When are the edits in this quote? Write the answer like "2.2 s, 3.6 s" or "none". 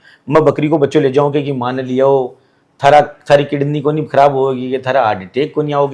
none

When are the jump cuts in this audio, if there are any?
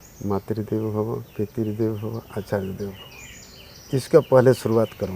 none

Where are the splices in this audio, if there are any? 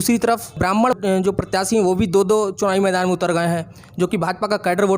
none

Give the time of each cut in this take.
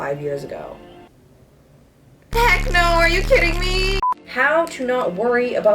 4.1 s

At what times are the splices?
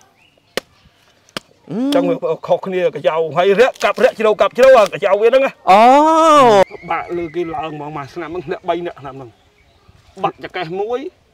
6.6 s

